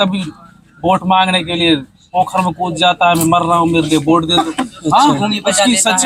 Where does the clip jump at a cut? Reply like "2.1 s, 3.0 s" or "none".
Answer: none